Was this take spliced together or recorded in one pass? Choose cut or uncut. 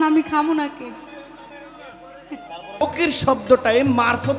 cut